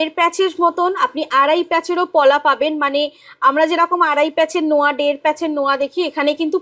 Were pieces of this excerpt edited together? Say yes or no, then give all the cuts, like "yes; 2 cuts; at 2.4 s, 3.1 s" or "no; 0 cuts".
no; 0 cuts